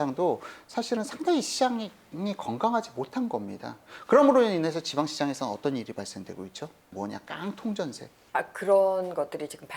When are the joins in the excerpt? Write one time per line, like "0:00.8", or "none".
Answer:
0:06.9
0:08.1

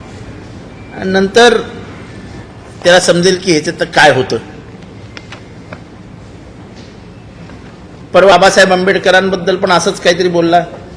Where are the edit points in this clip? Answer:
0:08.3

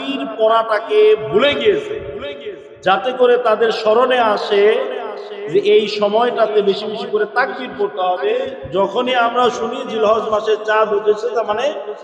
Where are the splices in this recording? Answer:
0:08.6

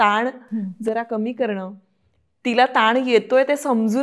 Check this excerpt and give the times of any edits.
none

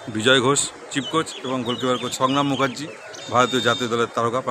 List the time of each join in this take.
none

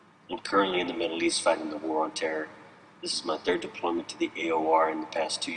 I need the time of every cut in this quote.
0:01.3

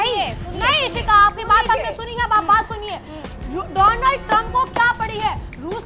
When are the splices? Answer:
none

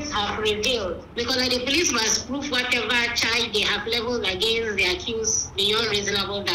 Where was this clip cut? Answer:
0:01.0

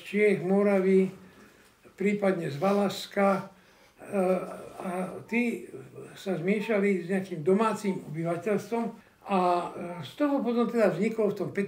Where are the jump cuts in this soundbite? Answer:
0:09.1

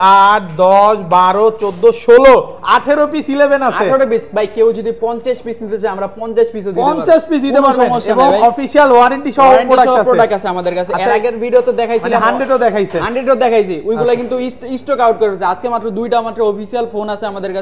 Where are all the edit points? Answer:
none

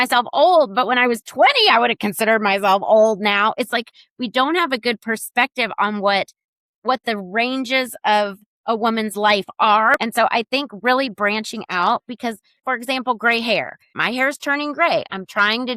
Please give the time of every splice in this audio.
0:10.0
0:12.6
0:14.0

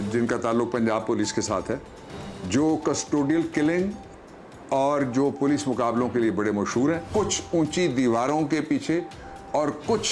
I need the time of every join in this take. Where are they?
0:07.0

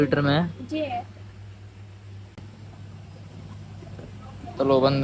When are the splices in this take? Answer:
none

